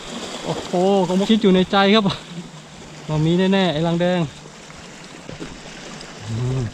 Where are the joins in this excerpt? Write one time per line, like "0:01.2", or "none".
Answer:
0:01.3
0:05.2